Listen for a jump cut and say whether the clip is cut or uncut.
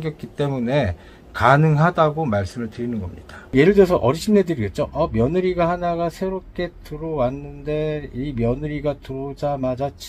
cut